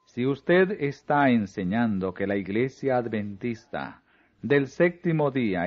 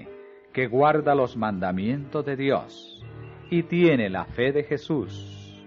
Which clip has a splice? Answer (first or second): first